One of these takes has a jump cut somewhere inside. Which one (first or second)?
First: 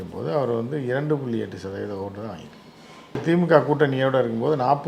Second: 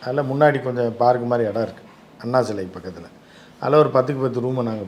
first